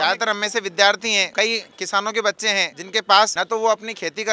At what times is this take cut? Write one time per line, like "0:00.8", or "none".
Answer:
0:01.3
0:03.1